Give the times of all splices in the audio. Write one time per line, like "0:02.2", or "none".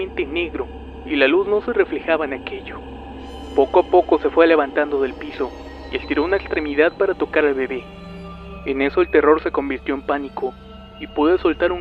none